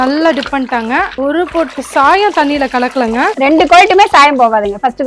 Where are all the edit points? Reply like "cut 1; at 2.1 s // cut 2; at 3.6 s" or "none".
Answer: cut 1; at 1.1 s // cut 2; at 3.3 s

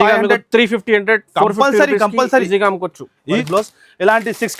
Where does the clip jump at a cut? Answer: cut 1; at 3.4 s

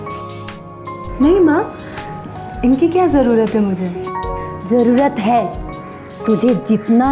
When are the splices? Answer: none

